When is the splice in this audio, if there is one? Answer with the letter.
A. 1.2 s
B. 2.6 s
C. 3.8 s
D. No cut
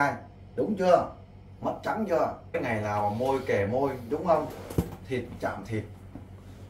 B